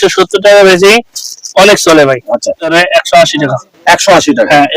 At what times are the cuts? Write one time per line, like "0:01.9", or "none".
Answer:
0:02.6